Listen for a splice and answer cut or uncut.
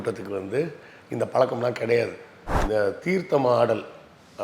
cut